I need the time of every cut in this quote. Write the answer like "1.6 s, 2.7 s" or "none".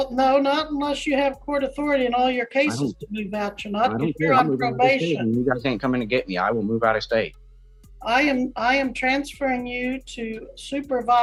none